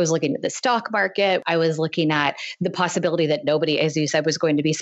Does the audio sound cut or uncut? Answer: cut